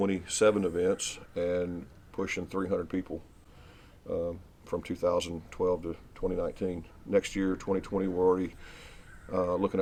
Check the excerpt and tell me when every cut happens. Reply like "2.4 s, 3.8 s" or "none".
none